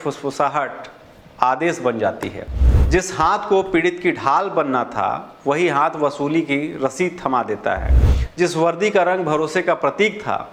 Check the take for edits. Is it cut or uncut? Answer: uncut